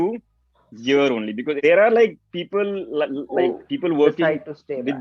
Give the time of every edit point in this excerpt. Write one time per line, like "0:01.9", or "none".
0:01.6